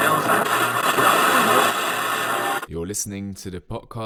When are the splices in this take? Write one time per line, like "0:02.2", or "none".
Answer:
none